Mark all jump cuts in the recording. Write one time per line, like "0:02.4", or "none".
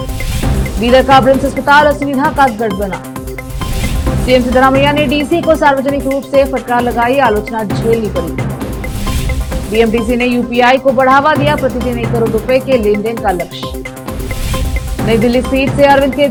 none

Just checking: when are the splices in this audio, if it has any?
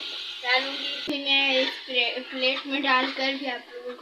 0:01.1

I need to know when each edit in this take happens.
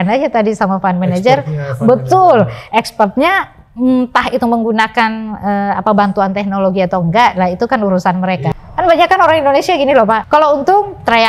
0:08.5
0:10.2

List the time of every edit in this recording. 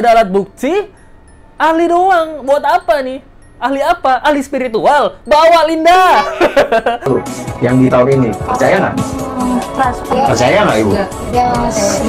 0:07.1

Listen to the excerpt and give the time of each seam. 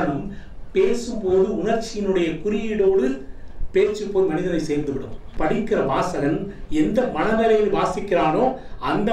0:05.2

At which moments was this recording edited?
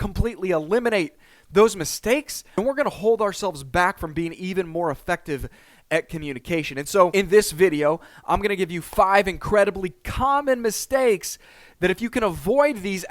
0:02.4
0:07.1

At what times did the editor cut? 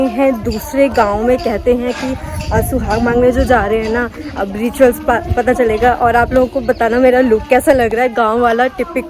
none

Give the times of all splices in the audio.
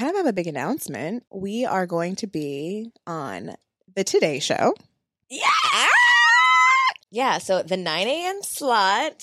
0:01.3
0:07.0

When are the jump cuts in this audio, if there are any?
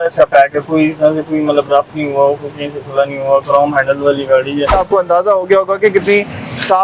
0:04.7

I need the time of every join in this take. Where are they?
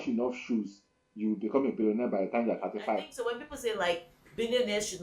0:03.1

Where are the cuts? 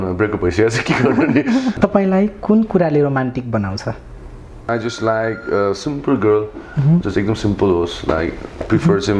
0:01.8
0:04.7

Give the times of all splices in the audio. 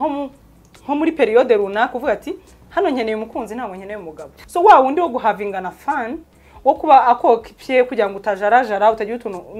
0:04.3

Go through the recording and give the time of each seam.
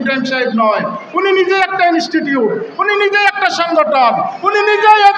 none

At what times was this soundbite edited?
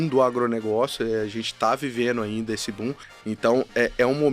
0:03.1

